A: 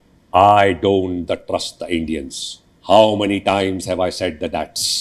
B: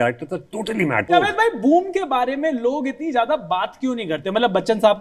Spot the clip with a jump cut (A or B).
B